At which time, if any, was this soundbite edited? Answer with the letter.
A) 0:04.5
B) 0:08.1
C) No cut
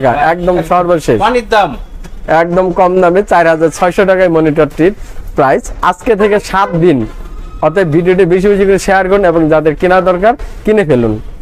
C